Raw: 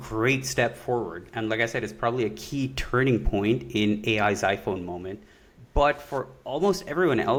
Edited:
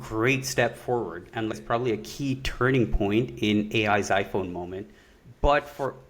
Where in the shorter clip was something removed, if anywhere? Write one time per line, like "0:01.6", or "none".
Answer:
0:01.5